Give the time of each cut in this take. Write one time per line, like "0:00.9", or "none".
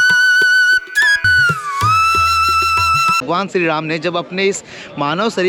0:01.3
0:03.2